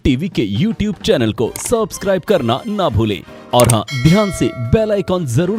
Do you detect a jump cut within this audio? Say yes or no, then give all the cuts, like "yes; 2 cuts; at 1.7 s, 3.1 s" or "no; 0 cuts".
no; 0 cuts